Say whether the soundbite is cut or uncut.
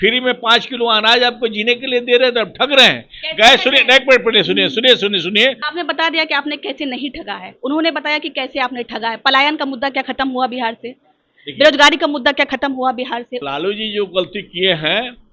cut